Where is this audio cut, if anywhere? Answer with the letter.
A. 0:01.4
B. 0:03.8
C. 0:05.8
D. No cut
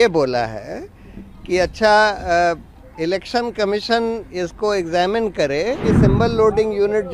C